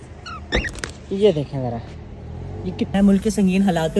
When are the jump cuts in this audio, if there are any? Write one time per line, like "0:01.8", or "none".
0:02.9